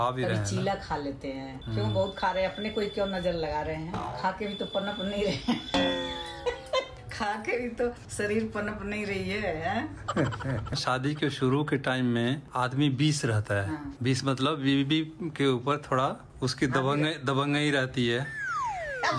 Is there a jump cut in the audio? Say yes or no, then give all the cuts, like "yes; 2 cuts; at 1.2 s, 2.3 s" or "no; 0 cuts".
yes; 1 cut; at 10.8 s